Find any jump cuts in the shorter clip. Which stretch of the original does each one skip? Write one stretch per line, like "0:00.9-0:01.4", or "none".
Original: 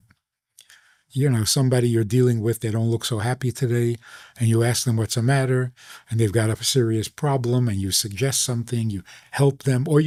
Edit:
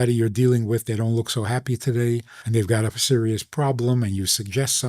0:04.1-0:06.0